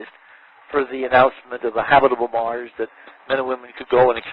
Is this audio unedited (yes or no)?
no